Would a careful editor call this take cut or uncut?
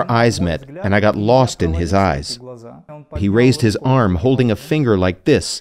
cut